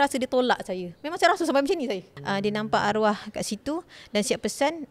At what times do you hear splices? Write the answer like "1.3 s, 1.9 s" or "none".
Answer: 2.1 s